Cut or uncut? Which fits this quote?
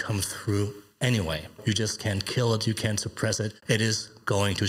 cut